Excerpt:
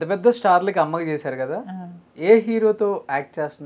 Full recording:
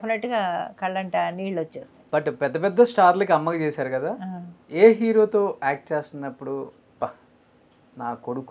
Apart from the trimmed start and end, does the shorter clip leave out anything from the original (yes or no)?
no